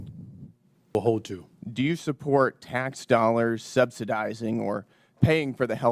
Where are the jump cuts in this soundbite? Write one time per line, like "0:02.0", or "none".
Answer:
0:00.9